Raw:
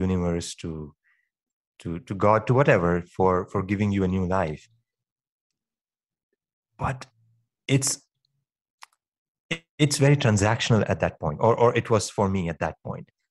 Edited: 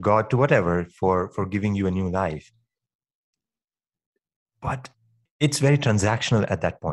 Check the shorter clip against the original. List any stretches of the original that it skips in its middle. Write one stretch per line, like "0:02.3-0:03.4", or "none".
0:07.4-0:09.7

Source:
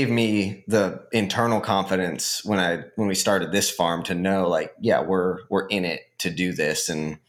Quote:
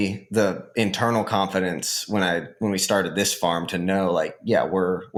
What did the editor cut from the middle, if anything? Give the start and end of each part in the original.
none

